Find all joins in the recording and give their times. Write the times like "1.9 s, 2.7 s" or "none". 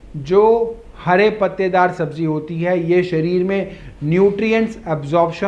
none